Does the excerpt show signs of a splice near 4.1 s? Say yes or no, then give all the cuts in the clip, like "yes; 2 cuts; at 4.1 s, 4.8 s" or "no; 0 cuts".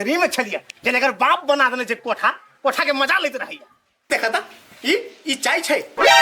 yes; 1 cut; at 4.1 s